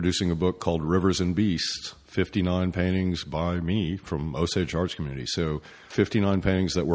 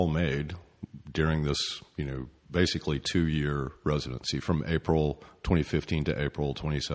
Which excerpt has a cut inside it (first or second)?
first